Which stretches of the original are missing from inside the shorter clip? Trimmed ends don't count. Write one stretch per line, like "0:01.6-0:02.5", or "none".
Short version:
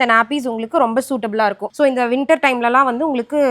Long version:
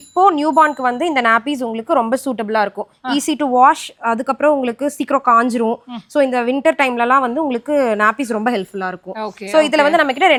0:02.8-0:06.0

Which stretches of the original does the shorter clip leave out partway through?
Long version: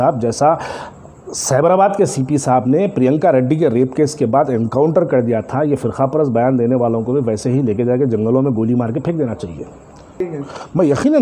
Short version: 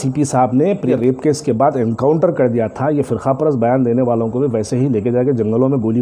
0:03.0-0:03.6

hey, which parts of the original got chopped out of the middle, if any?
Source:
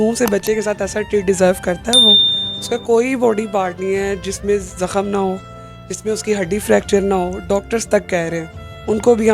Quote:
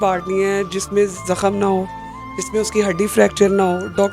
none

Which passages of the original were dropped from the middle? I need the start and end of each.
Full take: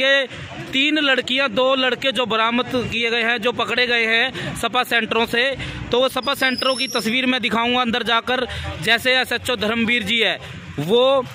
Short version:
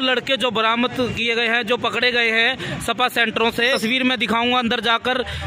0:05.5-0:07.0

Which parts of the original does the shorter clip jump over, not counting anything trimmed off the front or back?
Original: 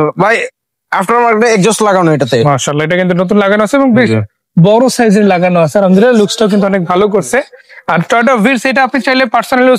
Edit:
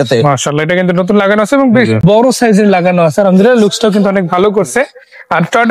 0:04.3-0:04.6

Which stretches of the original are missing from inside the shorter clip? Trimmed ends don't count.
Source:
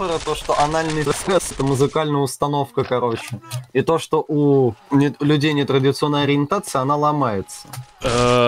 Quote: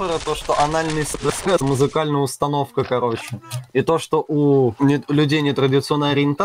0:04.7-0:04.9

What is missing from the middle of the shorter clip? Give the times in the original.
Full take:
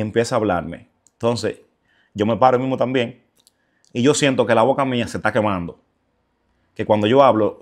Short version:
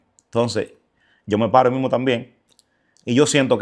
none

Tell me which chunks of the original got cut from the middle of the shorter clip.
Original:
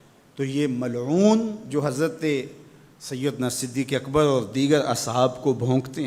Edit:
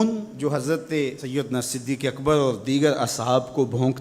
0:02.5-0:03.1

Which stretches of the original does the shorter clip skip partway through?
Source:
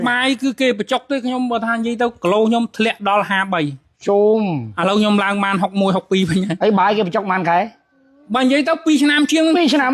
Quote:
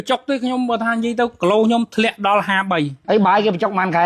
0:03.8-0:06.5

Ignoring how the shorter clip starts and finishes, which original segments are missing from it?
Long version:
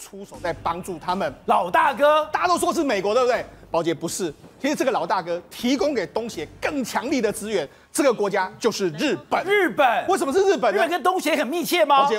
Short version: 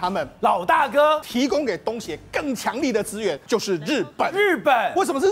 0:02.3-0:05.5
0:07.7-0:08.5

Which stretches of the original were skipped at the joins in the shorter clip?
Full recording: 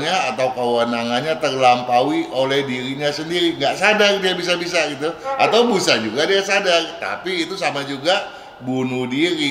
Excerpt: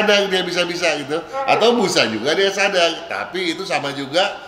none

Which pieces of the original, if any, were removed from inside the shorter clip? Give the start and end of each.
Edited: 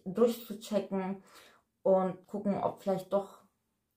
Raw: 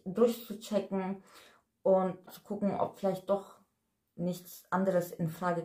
0:02.3-0:02.4

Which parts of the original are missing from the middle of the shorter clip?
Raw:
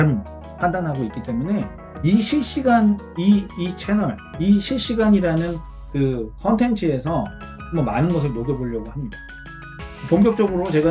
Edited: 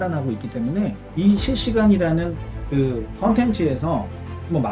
0:01.8-0:04.3

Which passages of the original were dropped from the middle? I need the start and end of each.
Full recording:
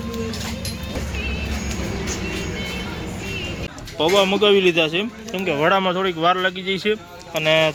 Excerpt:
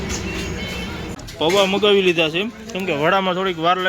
0:03.2-0:03.8

